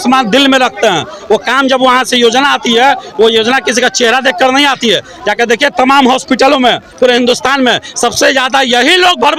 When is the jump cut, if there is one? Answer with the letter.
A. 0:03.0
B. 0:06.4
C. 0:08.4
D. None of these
D